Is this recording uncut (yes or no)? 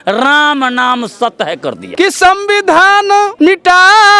no